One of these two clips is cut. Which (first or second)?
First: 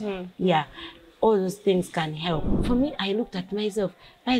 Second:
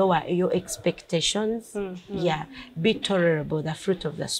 first